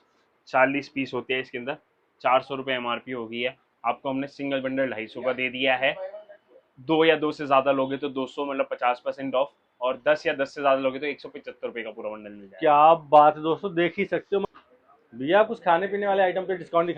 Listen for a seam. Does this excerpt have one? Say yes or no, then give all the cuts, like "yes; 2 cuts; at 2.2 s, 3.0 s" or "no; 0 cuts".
no; 0 cuts